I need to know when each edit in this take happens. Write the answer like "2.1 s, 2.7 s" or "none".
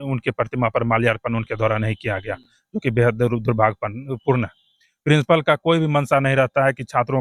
none